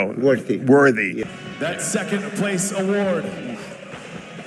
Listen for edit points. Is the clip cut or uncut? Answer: cut